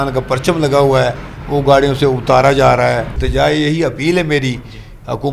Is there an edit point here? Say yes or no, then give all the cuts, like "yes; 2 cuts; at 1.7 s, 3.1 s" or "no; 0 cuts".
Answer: yes; 1 cut; at 3.1 s